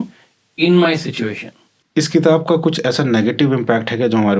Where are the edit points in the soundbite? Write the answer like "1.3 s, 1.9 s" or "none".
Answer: 1.8 s